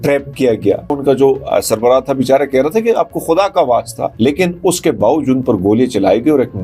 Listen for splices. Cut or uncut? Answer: cut